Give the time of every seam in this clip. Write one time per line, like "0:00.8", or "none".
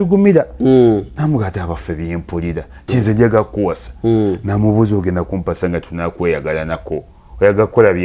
0:01.1